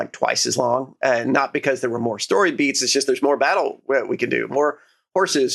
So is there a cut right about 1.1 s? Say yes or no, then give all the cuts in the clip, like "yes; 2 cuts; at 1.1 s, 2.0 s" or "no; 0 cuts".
no; 0 cuts